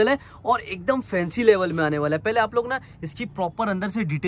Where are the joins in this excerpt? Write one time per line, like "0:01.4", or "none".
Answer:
none